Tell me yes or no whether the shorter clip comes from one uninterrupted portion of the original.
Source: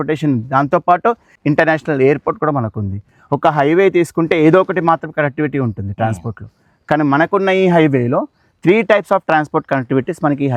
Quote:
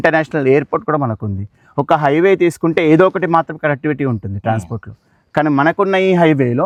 yes